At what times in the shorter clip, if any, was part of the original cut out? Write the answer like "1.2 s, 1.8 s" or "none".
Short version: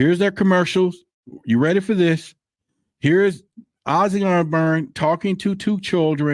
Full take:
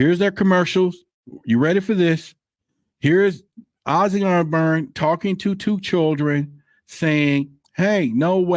none